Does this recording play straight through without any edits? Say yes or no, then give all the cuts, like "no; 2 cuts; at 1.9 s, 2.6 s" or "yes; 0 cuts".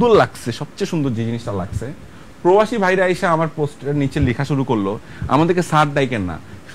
yes; 0 cuts